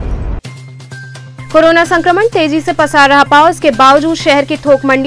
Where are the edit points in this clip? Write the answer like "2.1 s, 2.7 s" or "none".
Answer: 1.1 s